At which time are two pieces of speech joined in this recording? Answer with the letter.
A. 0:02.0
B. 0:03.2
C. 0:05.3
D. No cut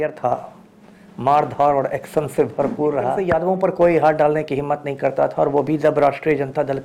B